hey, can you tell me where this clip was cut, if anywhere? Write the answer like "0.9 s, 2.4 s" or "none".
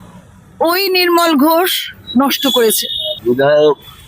3.1 s